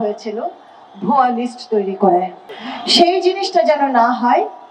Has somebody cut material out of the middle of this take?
no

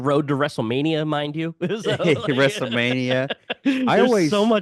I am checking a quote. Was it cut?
no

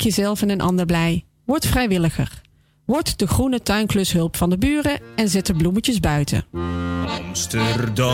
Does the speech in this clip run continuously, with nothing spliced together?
yes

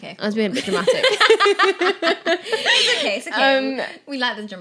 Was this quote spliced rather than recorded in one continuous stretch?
no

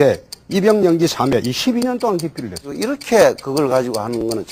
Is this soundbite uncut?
yes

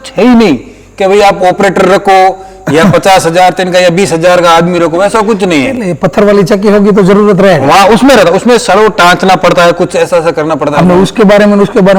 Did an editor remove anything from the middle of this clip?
no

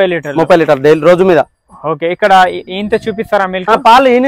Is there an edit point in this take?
no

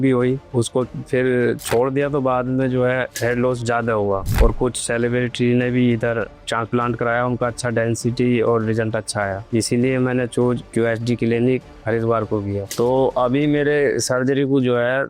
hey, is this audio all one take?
no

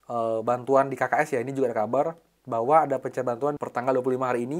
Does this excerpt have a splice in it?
yes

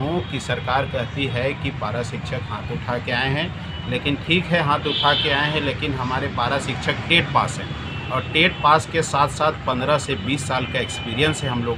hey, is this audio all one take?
yes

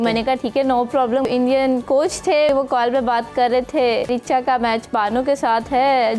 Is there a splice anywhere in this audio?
yes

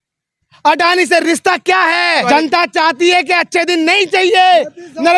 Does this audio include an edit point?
yes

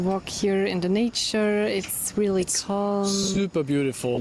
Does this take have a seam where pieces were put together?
no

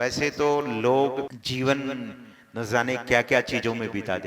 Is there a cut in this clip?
yes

